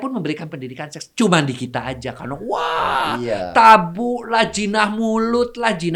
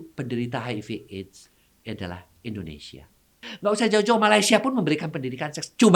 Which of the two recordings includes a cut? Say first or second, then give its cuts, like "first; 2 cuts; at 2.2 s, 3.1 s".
second; 1 cut; at 3.4 s